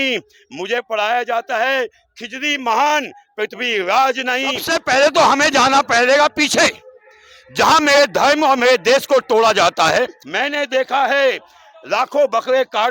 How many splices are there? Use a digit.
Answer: 2